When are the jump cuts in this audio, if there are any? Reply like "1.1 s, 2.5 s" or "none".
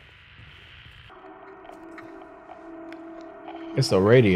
1.1 s